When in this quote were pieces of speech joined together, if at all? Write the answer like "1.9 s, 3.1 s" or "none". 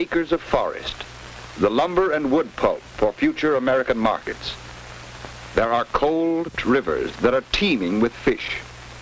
none